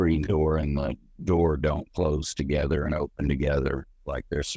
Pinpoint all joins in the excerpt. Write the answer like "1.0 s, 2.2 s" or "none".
none